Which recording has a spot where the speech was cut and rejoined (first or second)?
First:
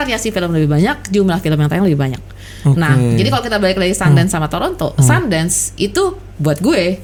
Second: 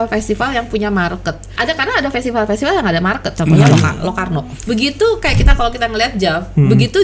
second